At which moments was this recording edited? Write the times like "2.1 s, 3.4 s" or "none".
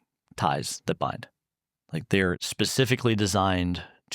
2.4 s